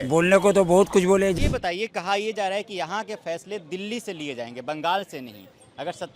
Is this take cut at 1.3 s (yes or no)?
yes